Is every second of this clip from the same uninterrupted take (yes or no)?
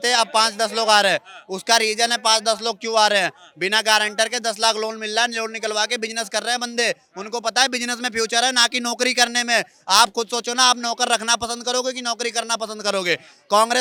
yes